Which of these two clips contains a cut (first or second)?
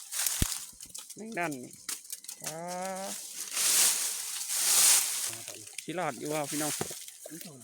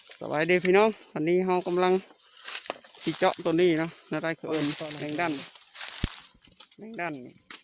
first